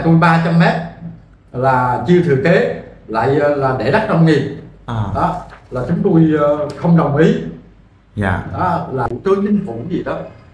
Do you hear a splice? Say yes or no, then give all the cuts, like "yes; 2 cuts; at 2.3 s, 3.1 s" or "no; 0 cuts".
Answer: yes; 1 cut; at 9.1 s